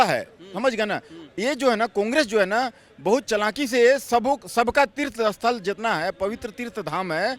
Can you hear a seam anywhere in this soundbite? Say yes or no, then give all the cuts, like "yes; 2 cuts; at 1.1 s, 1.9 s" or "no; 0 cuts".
no; 0 cuts